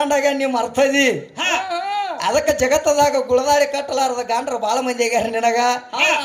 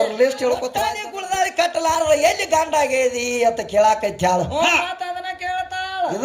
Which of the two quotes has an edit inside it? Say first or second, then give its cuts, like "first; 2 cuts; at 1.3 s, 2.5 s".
second; 1 cut; at 0.9 s